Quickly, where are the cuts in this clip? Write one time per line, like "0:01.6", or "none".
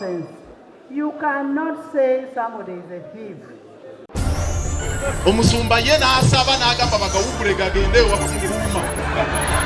0:04.0